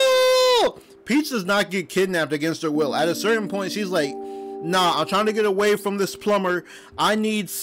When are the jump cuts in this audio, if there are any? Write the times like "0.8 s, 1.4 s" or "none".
none